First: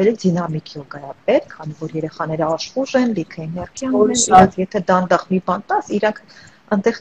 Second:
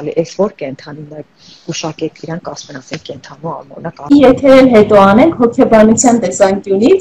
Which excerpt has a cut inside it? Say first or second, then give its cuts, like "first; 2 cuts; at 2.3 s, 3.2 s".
second; 1 cut; at 4.1 s